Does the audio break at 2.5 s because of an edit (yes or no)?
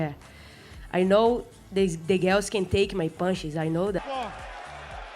no